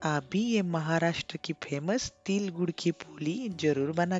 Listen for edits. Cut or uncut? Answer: uncut